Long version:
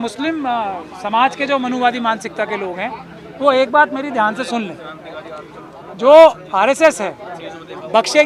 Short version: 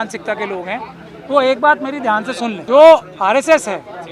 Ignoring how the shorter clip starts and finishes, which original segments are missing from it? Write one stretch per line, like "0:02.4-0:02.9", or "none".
0:04.7-0:05.9